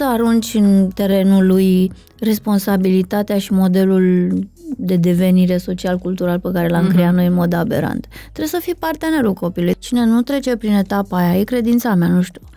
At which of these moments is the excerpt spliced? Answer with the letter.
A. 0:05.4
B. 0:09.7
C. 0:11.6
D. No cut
B